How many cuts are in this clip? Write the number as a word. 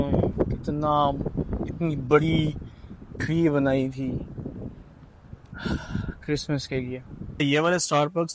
one